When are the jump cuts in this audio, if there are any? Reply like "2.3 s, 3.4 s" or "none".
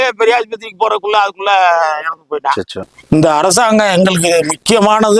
2.7 s